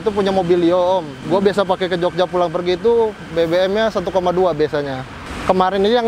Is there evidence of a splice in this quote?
yes; 2 cuts; at 1.1 s, 5.2 s

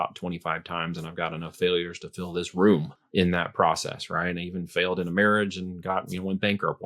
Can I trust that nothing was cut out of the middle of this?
no; 1 cut; at 3.0 s

